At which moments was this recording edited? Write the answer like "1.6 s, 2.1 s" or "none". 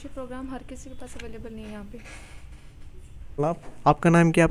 none